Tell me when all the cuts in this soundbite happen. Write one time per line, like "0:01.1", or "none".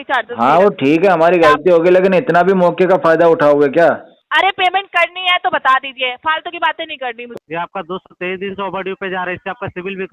0:04.1
0:07.2